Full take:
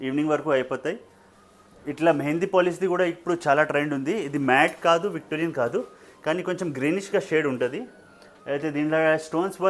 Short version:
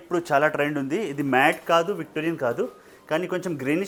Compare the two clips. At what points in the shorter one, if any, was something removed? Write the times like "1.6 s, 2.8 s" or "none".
none